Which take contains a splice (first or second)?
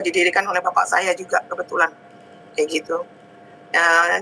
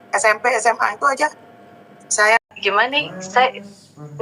second